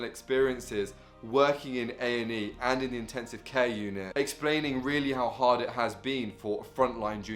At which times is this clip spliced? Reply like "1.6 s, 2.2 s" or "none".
none